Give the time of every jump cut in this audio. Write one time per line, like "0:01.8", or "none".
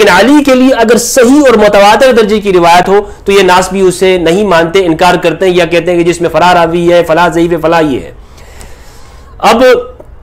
none